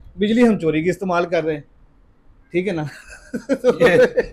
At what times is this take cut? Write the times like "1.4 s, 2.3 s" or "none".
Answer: none